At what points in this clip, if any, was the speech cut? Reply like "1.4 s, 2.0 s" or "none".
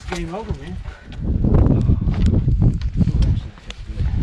1.1 s